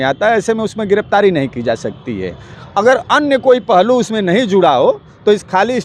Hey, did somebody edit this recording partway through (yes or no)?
no